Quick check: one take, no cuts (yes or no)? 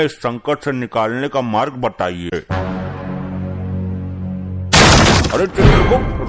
no